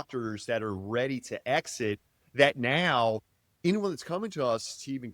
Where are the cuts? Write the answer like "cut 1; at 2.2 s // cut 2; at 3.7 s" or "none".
cut 1; at 3.6 s